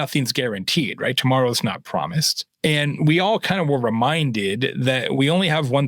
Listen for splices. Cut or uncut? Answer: cut